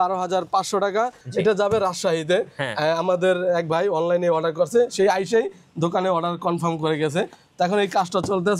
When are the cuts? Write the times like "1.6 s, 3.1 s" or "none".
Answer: 1.2 s